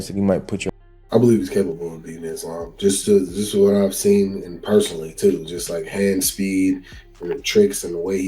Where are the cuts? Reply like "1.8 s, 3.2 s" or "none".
0.9 s